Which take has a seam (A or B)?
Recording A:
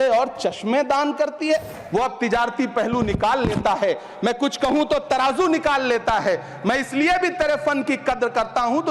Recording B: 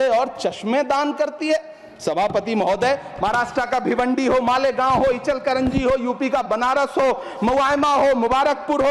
A